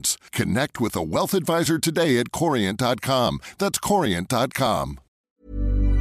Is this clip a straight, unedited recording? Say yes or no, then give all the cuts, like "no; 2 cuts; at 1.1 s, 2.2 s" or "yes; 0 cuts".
no; 1 cut; at 5.1 s